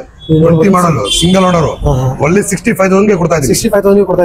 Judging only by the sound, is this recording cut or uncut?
uncut